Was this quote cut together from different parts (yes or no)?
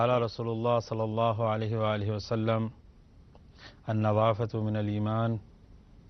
yes